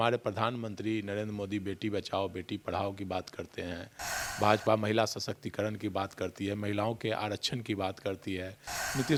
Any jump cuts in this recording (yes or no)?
no